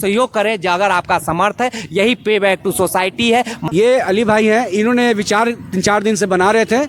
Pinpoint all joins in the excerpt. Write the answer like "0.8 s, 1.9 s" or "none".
3.7 s